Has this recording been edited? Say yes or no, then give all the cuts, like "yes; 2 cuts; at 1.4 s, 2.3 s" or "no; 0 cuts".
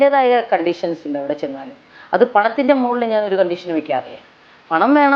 no; 0 cuts